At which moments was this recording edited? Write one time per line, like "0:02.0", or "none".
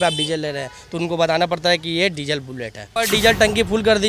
0:02.9